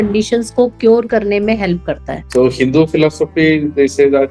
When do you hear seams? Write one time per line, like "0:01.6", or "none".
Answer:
0:02.2